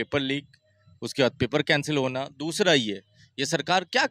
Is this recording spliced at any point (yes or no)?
no